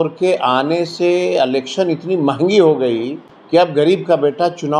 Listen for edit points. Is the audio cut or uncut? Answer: cut